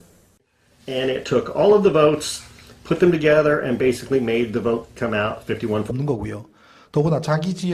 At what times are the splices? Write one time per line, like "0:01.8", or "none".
none